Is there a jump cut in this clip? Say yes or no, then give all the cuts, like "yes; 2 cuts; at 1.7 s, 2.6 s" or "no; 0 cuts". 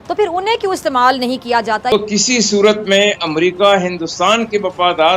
yes; 1 cut; at 1.9 s